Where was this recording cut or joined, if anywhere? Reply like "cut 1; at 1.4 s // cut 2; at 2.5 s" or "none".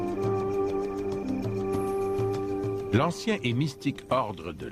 cut 1; at 3.7 s